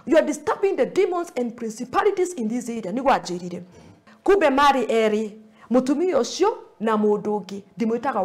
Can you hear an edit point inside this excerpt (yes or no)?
yes